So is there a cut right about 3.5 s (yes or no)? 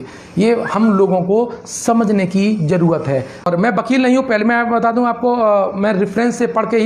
yes